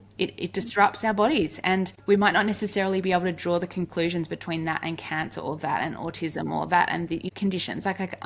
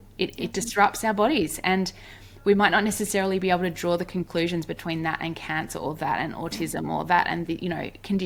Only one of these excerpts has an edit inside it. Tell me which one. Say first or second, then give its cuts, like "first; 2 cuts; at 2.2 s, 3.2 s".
first; 2 cuts; at 1.9 s, 7.3 s